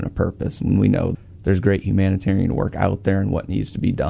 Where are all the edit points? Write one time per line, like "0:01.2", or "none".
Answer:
none